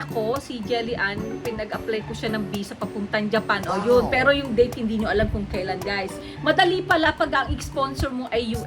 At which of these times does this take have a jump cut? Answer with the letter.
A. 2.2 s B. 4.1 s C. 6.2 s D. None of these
C